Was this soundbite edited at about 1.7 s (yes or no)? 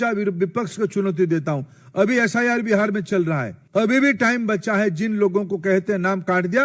no